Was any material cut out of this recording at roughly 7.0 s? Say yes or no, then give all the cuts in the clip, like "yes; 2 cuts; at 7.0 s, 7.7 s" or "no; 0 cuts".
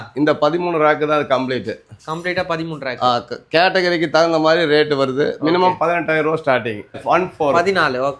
yes; 1 cut; at 7.0 s